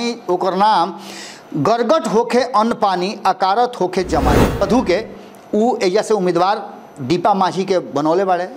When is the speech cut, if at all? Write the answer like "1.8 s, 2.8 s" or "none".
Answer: 4.6 s